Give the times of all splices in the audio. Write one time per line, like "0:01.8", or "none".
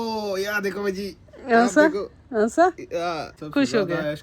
0:03.3